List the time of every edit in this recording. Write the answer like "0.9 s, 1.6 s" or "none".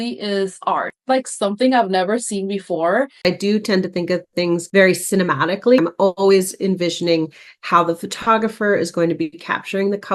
3.3 s, 5.8 s